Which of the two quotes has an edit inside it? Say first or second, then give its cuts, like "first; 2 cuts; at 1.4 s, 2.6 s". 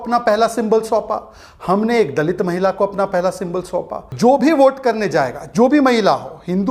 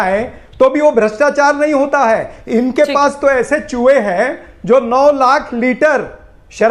first; 1 cut; at 4.1 s